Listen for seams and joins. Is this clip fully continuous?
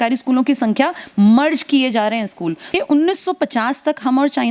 no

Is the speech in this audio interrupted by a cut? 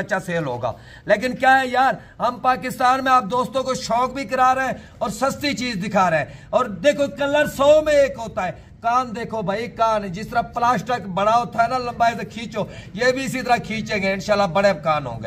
no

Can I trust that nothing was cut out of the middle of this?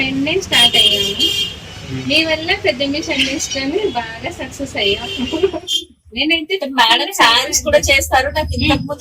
no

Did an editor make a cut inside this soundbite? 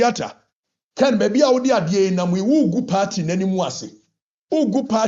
no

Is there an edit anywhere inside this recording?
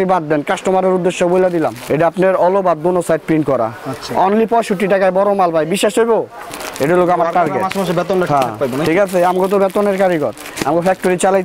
yes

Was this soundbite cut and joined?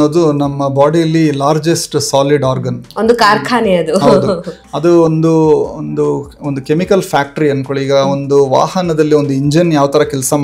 no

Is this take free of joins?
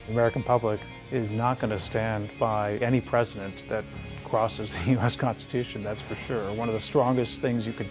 no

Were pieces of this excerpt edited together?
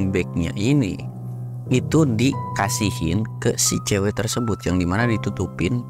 no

